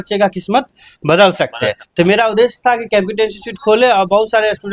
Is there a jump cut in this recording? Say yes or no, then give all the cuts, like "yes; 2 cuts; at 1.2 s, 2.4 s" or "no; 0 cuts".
no; 0 cuts